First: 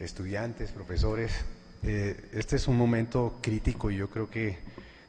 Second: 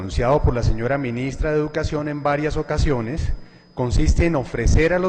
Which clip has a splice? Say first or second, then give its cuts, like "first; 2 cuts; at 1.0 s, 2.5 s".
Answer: second; 1 cut; at 1.5 s